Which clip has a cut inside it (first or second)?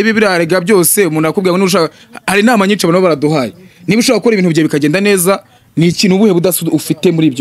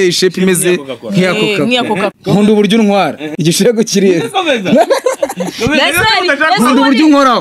second